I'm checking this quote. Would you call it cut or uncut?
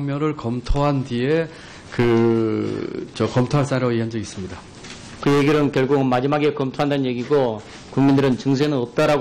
cut